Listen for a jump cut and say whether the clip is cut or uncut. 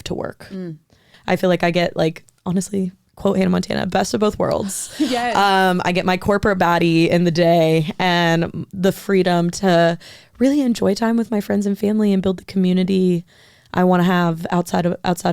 cut